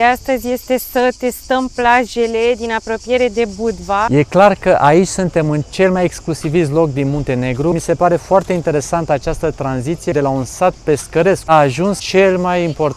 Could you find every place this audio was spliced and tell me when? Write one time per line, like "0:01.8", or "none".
0:04.1
0:07.7
0:10.1
0:11.8